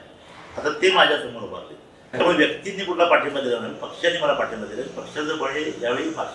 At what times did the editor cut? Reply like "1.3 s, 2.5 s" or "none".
2.0 s